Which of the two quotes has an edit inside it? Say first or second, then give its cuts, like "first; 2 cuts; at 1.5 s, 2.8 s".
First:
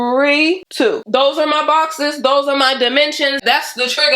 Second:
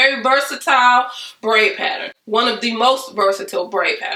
first; 1 cut; at 1.0 s